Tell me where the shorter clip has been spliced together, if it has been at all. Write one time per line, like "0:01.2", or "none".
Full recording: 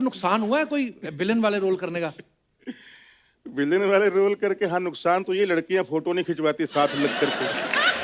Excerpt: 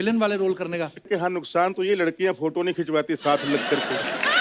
0:01.1